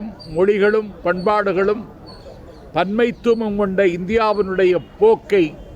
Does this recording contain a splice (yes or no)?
no